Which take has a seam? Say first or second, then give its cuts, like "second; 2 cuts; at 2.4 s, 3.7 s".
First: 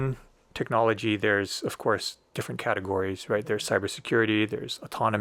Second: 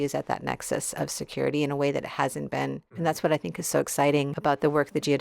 second; 2 cuts; at 3.0 s, 4.3 s